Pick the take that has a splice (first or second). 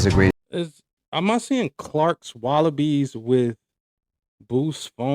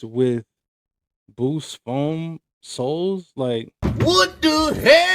second